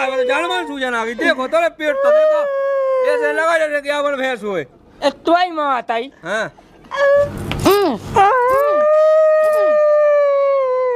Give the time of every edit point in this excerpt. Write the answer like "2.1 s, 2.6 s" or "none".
7.2 s